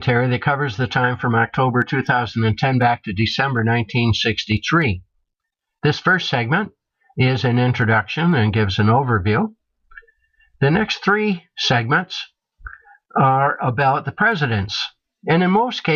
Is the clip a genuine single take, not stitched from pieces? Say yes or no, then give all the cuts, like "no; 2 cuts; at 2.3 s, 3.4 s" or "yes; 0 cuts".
yes; 0 cuts